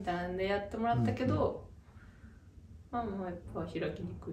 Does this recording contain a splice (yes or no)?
no